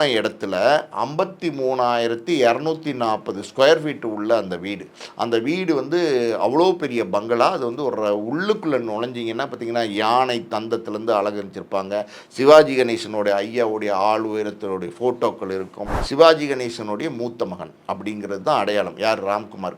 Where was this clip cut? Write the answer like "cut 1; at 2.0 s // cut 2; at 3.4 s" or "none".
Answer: cut 1; at 15.9 s

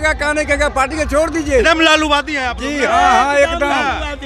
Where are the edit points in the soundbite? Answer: none

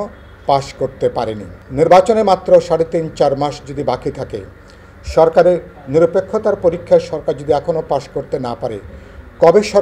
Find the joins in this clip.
cut 1; at 1.6 s

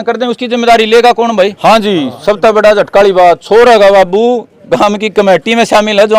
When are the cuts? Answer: cut 1; at 1.5 s

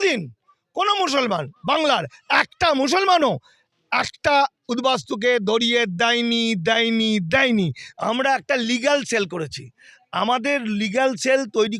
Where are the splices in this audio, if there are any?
cut 1; at 7.8 s

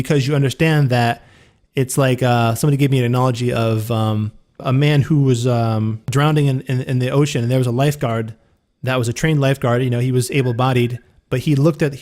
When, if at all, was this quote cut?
cut 1; at 4.6 s // cut 2; at 6.1 s

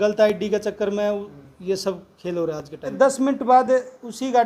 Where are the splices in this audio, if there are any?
cut 1; at 2.8 s

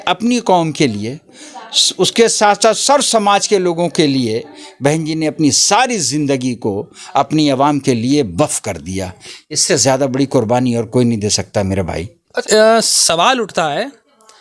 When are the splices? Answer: cut 1; at 12.3 s

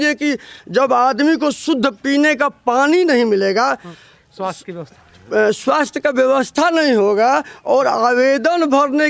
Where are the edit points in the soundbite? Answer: none

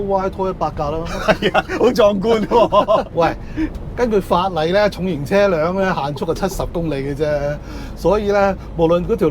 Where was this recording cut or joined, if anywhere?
cut 1; at 3.1 s

